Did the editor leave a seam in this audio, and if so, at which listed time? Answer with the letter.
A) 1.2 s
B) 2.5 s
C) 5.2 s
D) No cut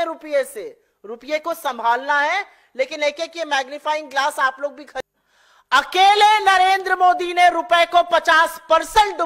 C